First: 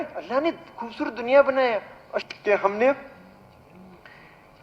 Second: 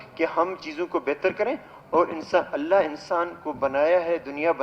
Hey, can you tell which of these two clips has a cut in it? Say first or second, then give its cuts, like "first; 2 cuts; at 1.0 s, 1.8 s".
first; 1 cut; at 2.2 s